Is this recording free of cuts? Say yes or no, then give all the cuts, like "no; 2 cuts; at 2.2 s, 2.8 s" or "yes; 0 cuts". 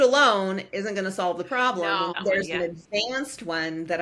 no; 1 cut; at 2.0 s